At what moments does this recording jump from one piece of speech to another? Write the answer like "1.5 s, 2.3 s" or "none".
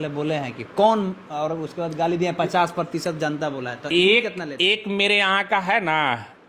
none

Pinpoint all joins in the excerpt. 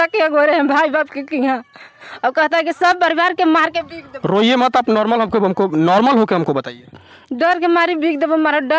none

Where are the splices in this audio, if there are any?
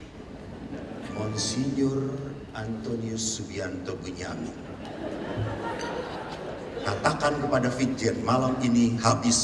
none

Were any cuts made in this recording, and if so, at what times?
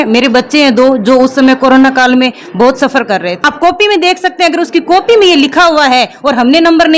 3.3 s

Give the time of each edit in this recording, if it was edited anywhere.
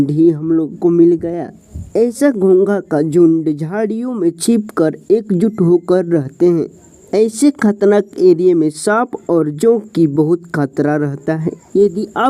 none

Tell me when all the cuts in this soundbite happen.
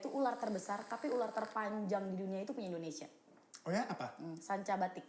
none

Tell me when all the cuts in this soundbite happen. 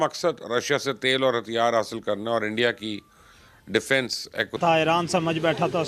4.5 s

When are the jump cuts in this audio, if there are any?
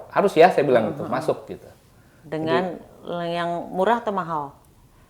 none

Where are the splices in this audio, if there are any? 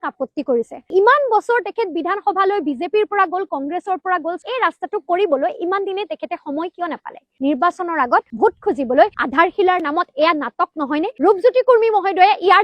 0.9 s, 4.4 s, 7.2 s

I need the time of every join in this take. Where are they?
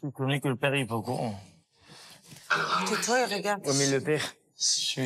none

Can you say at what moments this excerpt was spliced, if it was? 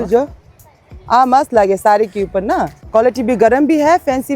2.8 s

